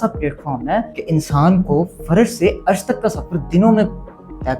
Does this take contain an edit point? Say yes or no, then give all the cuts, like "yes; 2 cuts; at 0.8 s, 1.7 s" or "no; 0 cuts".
yes; 1 cut; at 0.9 s